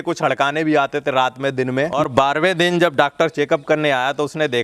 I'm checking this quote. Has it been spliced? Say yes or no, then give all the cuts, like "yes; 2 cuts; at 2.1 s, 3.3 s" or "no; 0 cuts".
yes; 1 cut; at 2.0 s